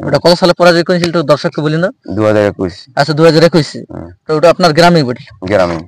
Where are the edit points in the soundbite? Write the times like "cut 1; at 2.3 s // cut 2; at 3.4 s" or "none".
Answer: none

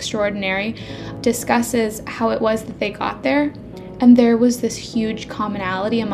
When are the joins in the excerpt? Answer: cut 1; at 1.1 s

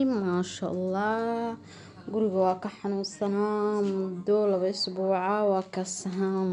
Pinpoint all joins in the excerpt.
none

